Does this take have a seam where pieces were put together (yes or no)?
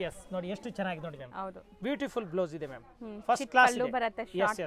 no